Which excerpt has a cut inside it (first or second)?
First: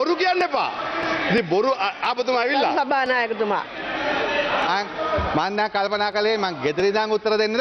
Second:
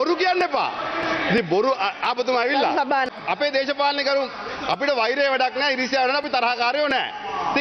second